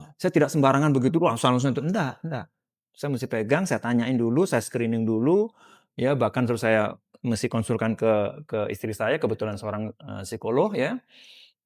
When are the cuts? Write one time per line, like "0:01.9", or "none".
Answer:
none